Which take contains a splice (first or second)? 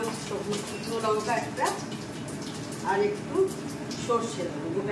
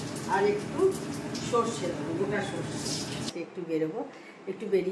second